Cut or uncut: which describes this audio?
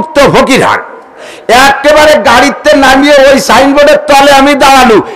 cut